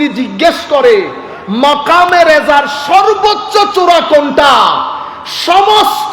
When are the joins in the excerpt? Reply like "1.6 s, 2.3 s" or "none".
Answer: none

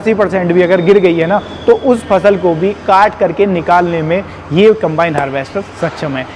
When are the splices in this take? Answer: none

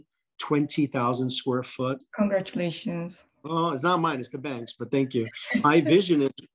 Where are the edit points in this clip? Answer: 2.0 s, 5.6 s

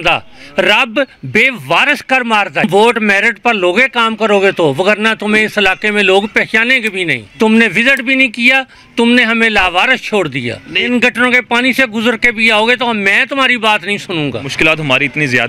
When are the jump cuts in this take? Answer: 2.6 s, 7.2 s, 10.7 s, 14.5 s

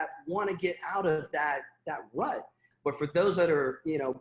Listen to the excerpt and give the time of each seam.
2.6 s

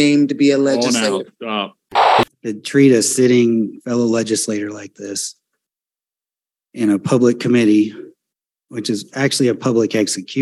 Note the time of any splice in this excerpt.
2.2 s

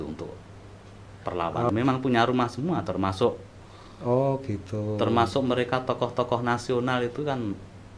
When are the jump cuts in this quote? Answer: 1.7 s

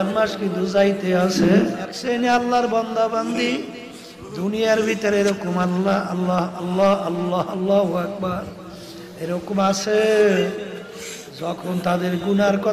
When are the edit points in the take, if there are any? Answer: 1.8 s

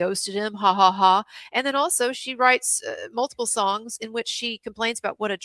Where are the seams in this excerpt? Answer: none

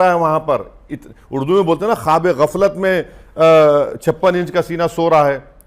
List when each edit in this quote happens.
none

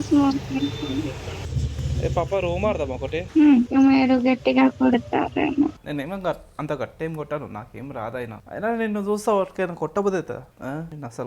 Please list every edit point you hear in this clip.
1.4 s, 3.6 s, 5.8 s

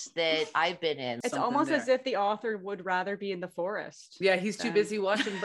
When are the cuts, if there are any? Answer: 1.2 s

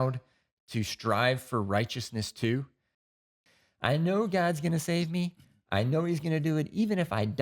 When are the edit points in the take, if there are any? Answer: 3.2 s

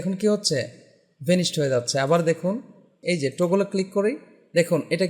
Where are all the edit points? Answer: 2.9 s

